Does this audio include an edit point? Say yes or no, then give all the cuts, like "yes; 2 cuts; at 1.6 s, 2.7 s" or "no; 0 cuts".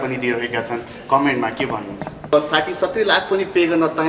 yes; 1 cut; at 2.3 s